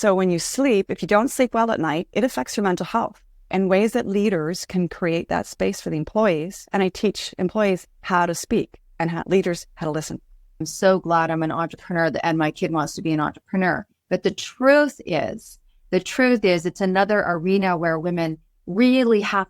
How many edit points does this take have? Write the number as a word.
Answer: two